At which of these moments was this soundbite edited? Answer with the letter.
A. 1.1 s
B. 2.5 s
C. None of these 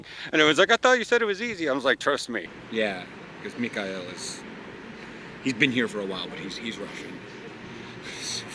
B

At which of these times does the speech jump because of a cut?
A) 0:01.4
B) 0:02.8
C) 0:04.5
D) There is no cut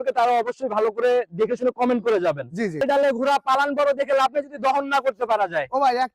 B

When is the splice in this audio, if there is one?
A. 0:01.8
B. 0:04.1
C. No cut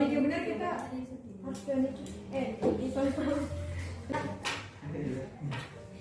B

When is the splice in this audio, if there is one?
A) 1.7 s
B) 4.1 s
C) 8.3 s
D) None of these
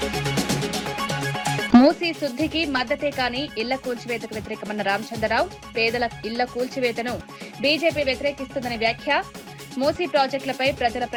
D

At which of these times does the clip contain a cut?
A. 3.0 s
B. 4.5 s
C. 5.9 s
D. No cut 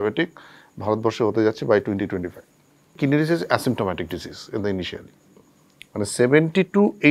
A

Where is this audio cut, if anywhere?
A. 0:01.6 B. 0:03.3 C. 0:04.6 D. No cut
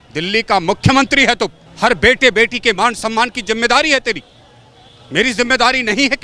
A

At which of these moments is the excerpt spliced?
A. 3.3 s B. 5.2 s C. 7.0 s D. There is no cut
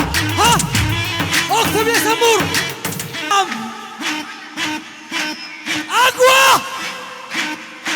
A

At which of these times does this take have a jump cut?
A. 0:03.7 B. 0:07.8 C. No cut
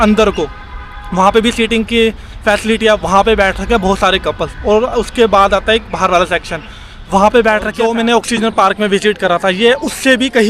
B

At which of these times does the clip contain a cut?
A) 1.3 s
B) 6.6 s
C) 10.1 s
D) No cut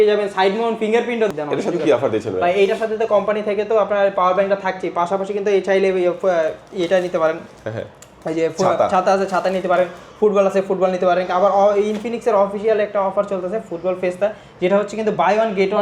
A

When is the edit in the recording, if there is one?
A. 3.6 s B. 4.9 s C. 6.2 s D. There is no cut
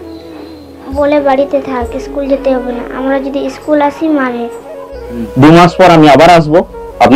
B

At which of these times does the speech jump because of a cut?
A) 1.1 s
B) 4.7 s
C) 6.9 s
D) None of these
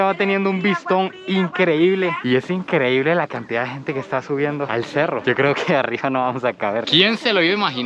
C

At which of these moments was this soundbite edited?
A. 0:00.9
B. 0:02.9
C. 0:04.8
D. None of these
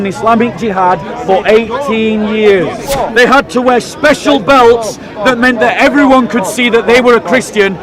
B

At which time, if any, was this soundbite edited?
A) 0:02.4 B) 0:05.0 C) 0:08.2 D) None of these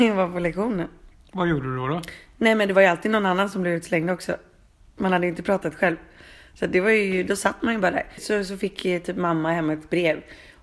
C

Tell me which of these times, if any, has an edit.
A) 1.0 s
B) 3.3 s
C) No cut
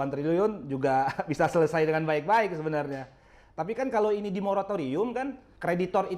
C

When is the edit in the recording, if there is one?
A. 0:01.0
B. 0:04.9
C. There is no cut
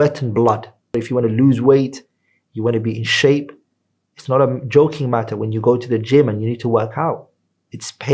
A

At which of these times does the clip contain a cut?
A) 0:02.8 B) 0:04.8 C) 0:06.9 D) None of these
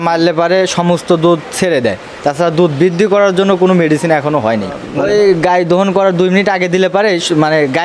B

